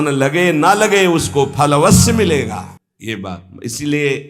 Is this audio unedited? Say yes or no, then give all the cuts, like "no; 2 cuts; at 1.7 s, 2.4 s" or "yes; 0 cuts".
yes; 0 cuts